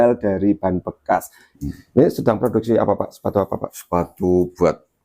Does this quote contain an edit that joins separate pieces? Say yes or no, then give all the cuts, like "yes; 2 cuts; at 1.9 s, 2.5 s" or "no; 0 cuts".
yes; 1 cut; at 1.5 s